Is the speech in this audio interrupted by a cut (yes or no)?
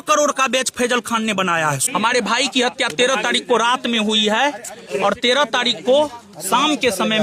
yes